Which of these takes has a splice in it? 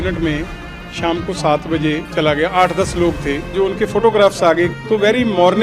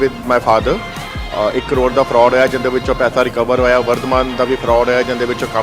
first; 3 cuts; at 2.1 s, 3.5 s, 4.8 s

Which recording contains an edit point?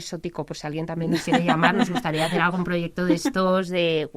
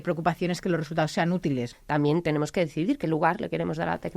second; 1 cut; at 1.6 s

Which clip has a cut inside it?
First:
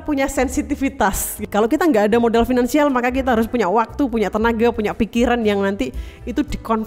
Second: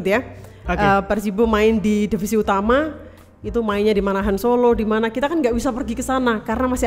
first; 1 cut; at 1.4 s

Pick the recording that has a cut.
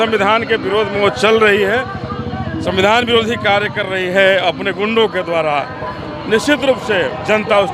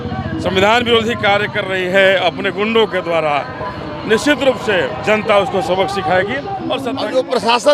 second; 1 cut; at 6.8 s

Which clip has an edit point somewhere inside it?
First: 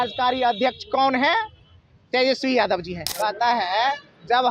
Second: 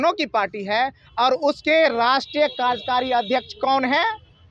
first; 1 cut; at 3.0 s

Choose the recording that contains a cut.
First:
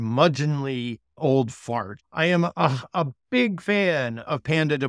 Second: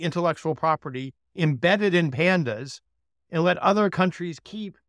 first; 2 cuts; at 1.1 s, 2.0 s

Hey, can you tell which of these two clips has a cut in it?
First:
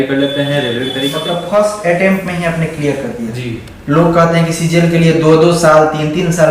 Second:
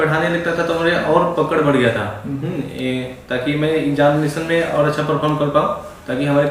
first; 1 cut; at 1.5 s

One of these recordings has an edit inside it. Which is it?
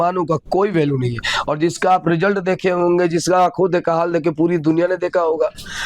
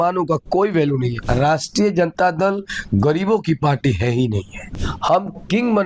second; 2 cuts; at 1.2 s, 4.8 s

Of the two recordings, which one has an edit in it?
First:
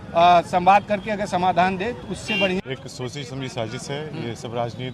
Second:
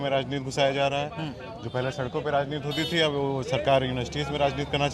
first; 1 cut; at 2.6 s

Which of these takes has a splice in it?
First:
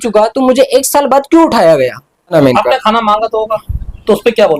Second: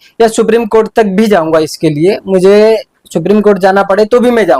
first; 1 cut; at 2.3 s

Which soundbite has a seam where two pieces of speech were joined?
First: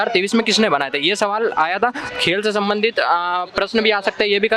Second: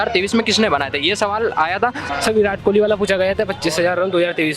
second; 1 cut; at 2.1 s

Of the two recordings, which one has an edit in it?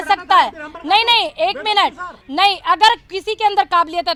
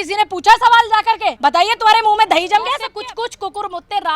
second; 2 cuts; at 1.3 s, 2.8 s

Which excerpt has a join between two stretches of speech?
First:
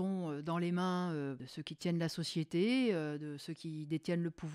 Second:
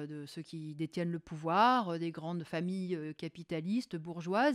first; 1 cut; at 1.5 s

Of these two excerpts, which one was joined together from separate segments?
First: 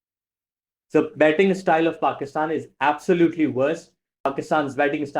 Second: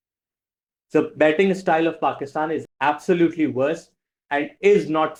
first; 1 cut; at 4.3 s

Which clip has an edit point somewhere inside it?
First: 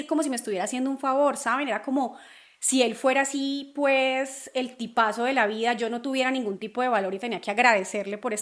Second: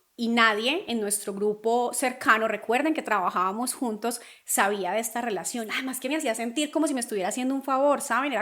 second; 1 cut; at 5.7 s

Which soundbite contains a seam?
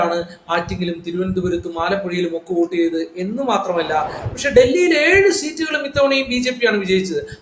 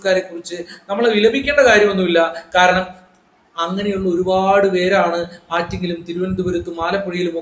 first; 1 cut; at 4.2 s

